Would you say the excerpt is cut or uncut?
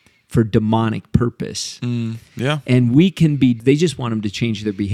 cut